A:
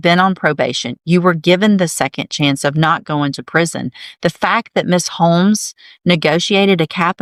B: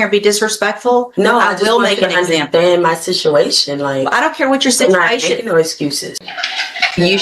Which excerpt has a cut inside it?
B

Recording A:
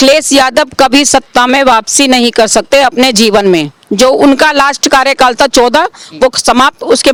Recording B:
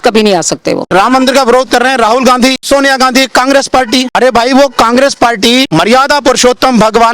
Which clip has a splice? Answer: B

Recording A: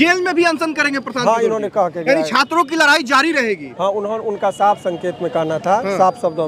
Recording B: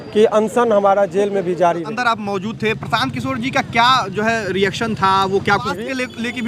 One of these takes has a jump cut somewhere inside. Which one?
B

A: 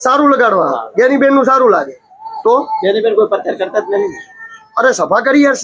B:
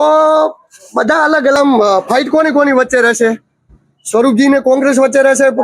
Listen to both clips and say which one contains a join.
B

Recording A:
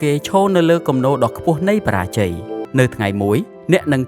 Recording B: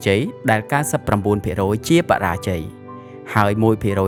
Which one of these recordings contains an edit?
A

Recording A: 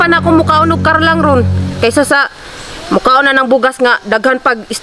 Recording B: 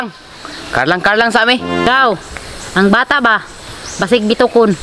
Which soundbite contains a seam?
B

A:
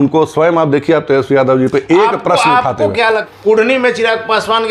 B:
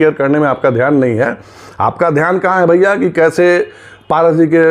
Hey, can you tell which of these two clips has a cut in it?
A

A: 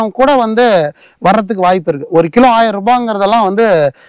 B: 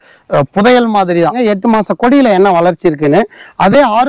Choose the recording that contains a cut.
B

